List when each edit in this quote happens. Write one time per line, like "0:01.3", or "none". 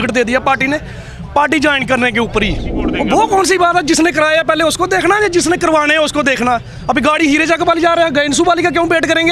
0:02.8